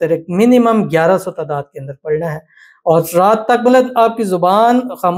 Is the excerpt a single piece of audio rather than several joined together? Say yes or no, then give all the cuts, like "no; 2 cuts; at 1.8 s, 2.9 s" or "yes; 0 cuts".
yes; 0 cuts